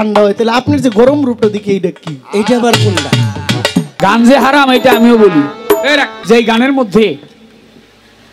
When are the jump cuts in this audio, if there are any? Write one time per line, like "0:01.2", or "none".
0:04.0
0:06.1